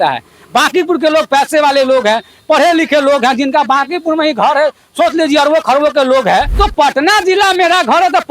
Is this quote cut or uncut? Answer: cut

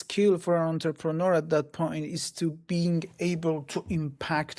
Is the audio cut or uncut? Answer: uncut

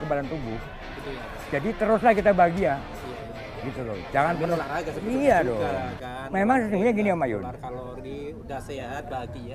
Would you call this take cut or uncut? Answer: uncut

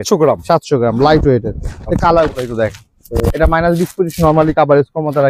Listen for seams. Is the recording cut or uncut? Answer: cut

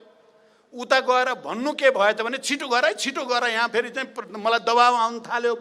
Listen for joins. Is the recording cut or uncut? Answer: uncut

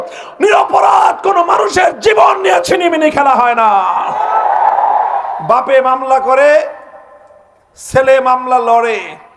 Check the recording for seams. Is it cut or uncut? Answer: cut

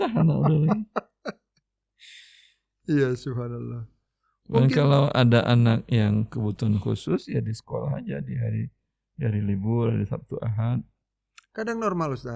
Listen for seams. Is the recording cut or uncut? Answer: uncut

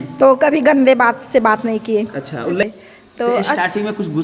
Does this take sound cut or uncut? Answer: cut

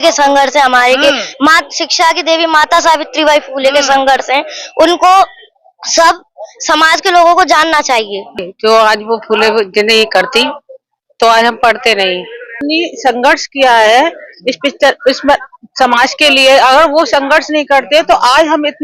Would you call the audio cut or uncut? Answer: cut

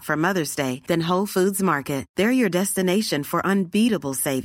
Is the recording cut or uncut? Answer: uncut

